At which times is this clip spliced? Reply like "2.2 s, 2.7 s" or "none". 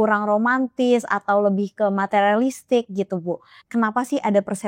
3.6 s